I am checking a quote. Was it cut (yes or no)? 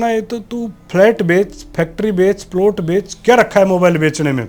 no